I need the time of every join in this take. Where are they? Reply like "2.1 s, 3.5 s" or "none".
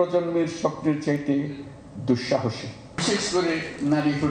none